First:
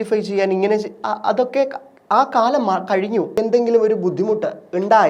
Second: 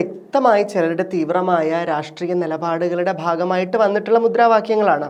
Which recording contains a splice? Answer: first; 1 cut; at 3.4 s

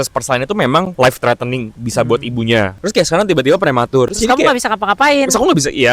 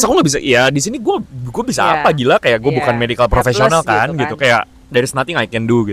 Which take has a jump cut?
first; 4 cuts; at 0.9 s, 1.8 s, 2.8 s, 4.1 s

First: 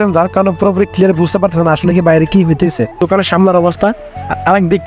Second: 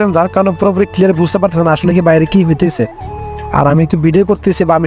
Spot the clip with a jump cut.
first; 1 cut; at 3.0 s

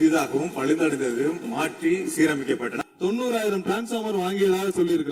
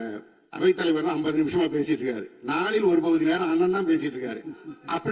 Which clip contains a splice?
first; 1 cut; at 2.7 s

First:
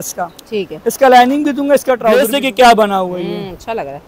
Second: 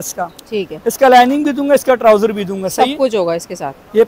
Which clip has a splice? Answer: first; 1 cut; at 2.2 s

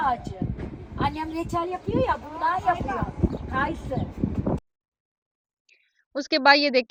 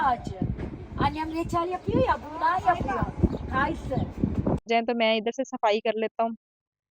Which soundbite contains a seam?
second; 1 cut; at 4.7 s

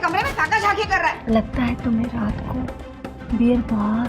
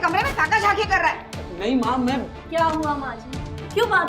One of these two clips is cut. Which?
first; 1 cut; at 1.2 s

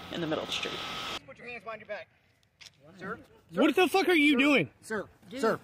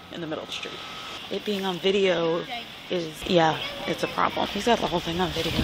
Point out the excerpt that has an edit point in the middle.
second; 3 cuts; at 1.2 s, 3.2 s, 4.5 s

